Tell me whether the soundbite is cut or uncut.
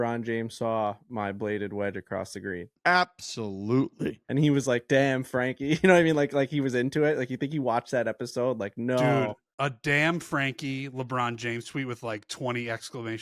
cut